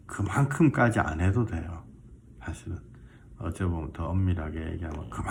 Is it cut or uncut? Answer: uncut